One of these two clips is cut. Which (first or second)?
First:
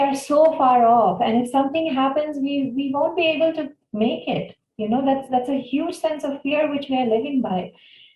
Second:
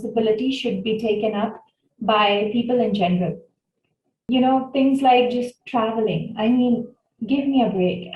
second